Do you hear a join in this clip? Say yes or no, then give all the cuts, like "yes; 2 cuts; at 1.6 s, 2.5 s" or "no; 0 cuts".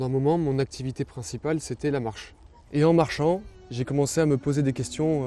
no; 0 cuts